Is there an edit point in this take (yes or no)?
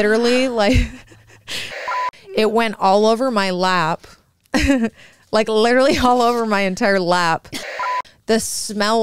yes